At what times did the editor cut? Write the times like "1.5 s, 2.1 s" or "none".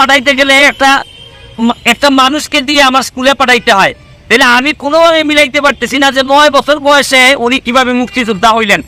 none